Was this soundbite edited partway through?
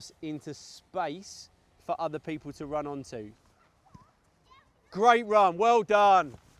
yes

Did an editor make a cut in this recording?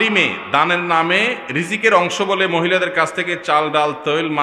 no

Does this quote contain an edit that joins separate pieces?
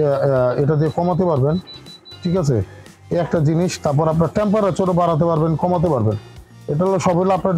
no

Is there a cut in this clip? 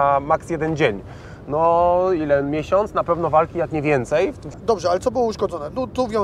yes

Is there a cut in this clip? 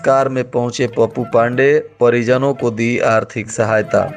no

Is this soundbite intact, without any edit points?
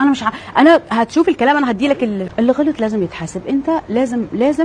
no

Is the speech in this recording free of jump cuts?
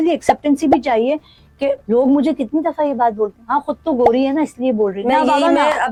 yes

